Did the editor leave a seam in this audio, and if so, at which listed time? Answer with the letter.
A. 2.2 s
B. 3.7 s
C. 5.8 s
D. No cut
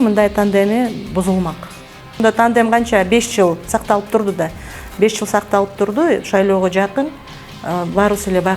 A